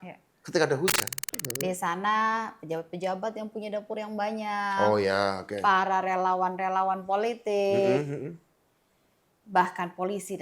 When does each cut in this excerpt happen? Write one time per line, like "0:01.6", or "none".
0:01.4